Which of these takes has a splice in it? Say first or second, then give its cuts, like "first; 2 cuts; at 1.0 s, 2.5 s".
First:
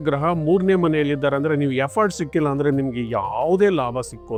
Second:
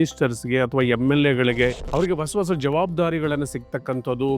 second; 1 cut; at 1.8 s